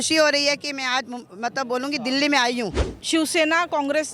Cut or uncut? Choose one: cut